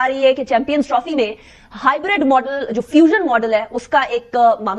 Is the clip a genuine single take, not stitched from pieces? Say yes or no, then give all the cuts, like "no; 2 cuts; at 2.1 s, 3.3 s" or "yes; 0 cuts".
yes; 0 cuts